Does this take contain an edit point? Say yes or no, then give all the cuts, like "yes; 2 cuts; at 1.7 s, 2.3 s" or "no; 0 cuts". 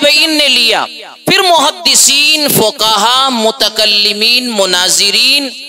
no; 0 cuts